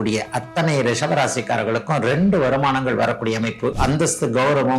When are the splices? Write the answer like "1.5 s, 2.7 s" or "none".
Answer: 3.8 s

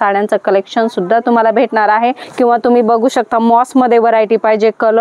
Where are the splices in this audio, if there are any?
2.2 s

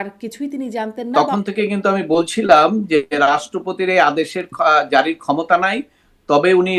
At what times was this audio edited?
1.1 s

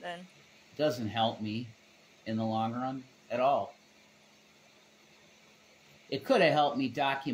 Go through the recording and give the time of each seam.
5.3 s

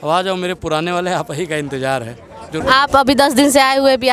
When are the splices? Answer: 2.6 s

